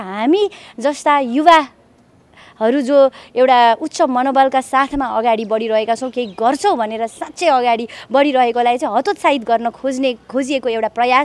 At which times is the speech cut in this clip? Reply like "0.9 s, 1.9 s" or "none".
none